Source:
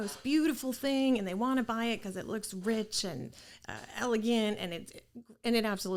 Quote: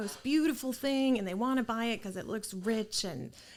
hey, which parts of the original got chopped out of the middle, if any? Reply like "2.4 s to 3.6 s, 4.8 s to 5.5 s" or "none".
none